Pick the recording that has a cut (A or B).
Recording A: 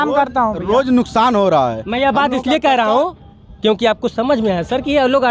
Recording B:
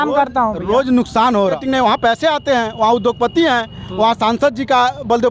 B